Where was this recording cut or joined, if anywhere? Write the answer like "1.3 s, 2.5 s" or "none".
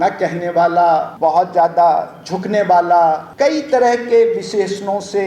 1.1 s, 3.3 s